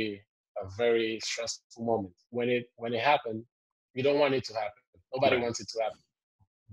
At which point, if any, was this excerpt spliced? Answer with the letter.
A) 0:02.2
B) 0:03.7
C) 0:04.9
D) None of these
A